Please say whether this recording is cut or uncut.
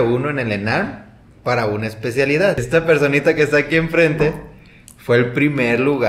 cut